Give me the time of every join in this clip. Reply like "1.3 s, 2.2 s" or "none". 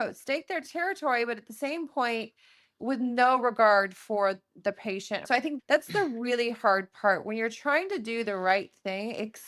5.3 s